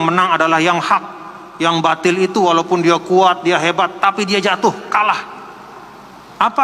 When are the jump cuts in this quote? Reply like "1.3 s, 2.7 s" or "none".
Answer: none

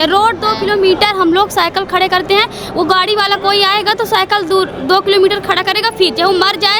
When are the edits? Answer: none

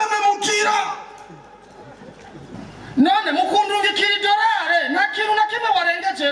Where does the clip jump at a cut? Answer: 2.5 s

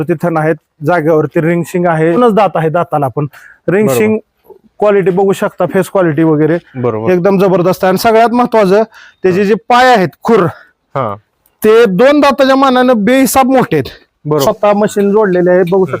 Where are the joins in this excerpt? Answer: 2.2 s, 14.4 s

